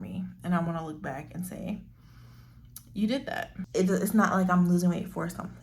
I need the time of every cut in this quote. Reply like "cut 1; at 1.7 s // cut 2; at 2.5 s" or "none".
cut 1; at 3.6 s